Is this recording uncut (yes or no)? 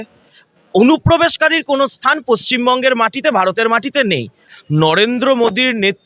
no